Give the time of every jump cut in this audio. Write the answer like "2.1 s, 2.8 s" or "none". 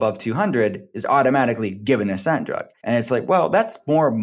2.7 s